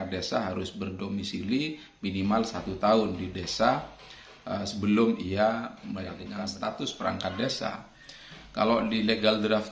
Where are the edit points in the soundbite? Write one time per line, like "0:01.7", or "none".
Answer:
0:06.2